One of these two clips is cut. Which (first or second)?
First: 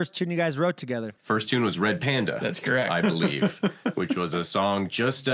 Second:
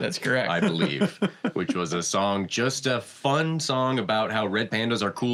first